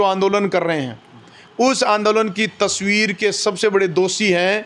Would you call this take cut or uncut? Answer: uncut